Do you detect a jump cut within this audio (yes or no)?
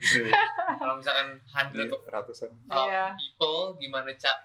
no